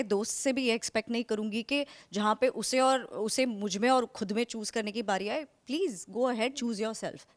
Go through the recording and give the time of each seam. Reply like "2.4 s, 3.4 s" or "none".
none